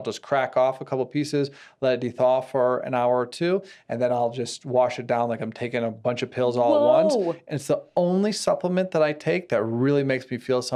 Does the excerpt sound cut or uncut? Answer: uncut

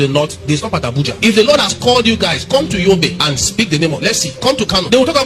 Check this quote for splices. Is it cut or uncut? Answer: uncut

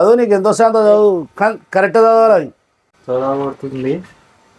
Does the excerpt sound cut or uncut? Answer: cut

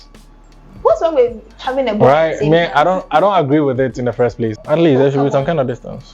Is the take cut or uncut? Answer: cut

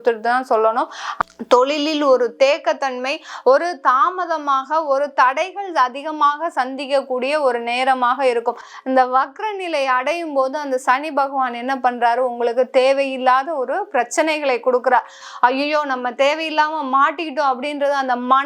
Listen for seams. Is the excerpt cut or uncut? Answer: cut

